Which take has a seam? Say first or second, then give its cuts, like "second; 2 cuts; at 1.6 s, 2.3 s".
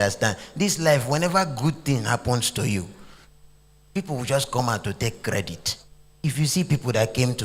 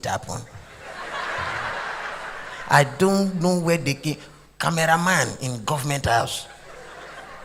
first; 1 cut; at 6.2 s